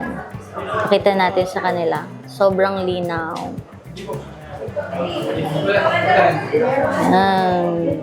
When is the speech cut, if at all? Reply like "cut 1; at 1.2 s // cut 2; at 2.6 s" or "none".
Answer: none